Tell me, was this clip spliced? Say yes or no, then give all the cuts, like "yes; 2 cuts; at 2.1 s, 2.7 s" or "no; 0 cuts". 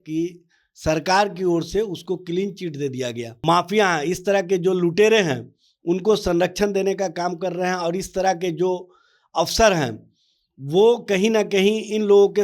yes; 1 cut; at 3.3 s